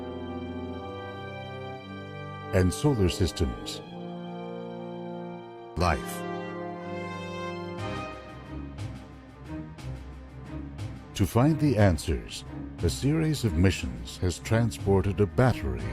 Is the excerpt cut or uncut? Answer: cut